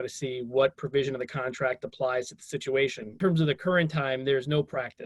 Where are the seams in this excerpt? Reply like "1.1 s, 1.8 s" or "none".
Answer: 3.1 s